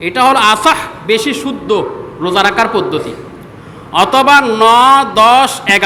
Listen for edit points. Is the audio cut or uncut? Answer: uncut